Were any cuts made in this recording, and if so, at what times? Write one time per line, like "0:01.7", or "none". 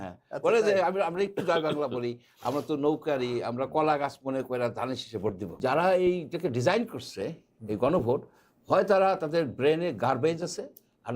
0:05.5